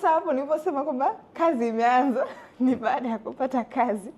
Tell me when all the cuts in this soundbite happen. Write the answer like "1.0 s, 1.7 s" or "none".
none